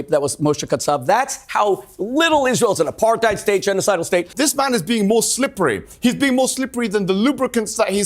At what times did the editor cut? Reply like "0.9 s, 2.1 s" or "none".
4.3 s